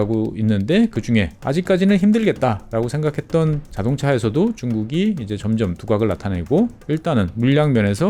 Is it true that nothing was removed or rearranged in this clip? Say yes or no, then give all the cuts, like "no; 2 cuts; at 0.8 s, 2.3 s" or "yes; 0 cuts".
yes; 0 cuts